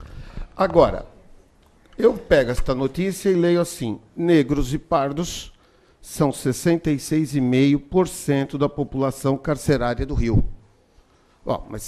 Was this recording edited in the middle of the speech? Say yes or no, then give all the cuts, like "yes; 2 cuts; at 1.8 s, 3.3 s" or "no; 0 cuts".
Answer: yes; 1 cut; at 8.5 s